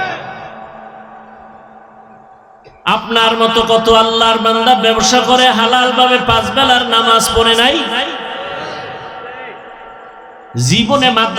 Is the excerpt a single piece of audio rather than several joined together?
yes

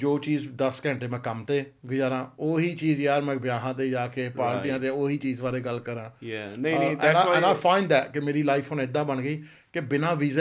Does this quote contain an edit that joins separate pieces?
no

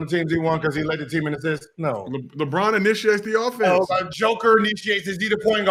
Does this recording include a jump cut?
no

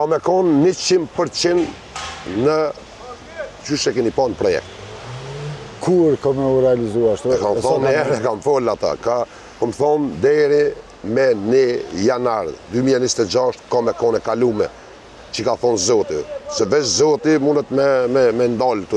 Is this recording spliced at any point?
no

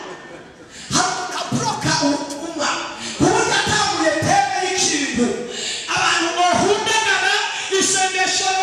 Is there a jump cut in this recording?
no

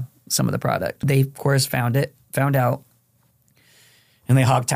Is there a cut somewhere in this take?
yes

